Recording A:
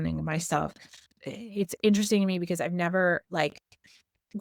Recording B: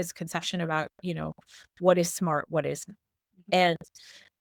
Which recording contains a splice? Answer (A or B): A